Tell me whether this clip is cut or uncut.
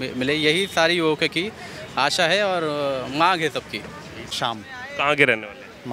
uncut